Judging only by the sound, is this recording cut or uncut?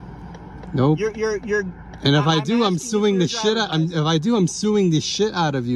uncut